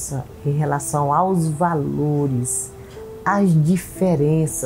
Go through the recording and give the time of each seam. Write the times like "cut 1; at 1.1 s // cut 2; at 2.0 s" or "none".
none